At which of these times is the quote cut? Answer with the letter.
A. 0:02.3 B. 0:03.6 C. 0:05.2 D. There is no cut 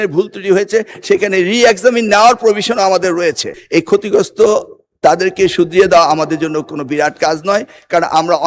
B